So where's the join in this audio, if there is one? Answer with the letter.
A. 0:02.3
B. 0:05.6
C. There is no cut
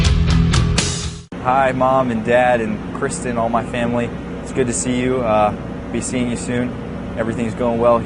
A